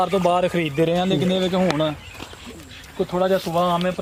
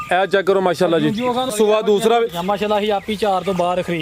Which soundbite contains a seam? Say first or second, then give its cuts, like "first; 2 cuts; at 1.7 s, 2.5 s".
second; 1 cut; at 1.5 s